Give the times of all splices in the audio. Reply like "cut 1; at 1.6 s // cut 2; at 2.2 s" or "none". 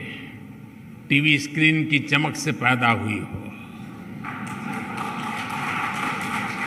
none